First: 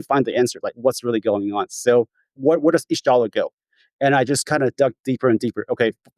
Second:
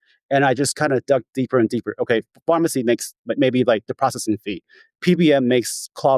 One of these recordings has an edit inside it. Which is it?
first; 1 cut; at 2.4 s

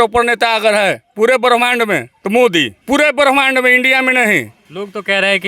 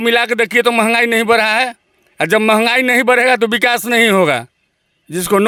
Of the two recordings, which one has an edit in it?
first; 3 cuts; at 2.1 s, 2.8 s, 4.6 s

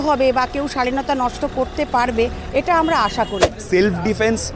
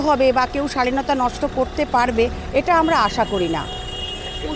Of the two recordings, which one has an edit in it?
first; 1 cut; at 3.4 s

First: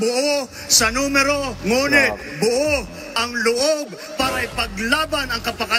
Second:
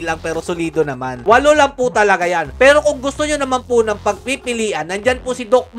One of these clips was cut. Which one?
second; 1 cut; at 1.2 s

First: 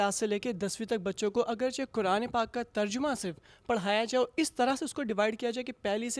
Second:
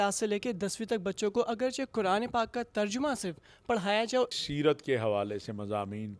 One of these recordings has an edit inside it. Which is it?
second; 1 cut; at 4.3 s

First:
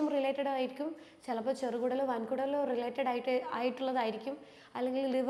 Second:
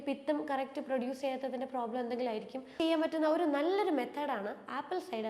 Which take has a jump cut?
second; 1 cut; at 2.6 s

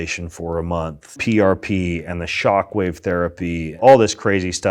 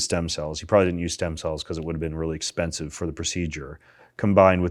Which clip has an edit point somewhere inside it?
first; 2 cuts; at 1.1 s, 3.8 s

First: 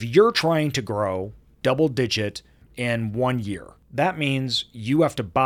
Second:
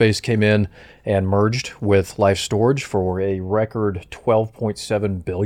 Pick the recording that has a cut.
first; 3 cuts; at 1.6 s, 2.6 s, 3.8 s

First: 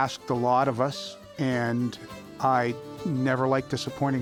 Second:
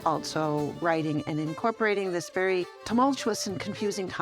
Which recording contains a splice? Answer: second; 1 cut; at 2.8 s

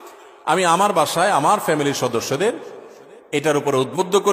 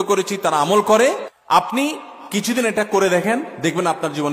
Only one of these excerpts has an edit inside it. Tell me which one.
second; 1 cut; at 1.3 s

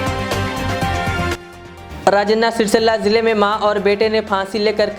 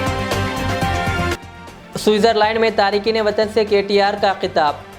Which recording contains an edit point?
second; 1 cut; at 1.3 s

